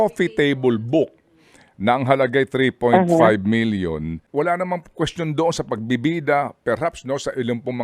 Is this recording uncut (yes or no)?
no